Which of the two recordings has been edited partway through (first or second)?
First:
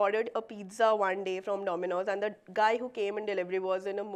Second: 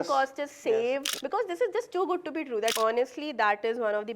second